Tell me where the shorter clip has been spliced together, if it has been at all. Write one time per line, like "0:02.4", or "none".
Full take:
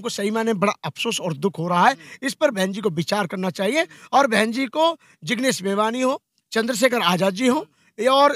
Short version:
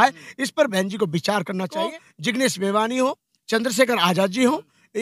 0:01.9